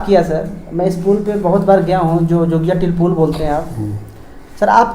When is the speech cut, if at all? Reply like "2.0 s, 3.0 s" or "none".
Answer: none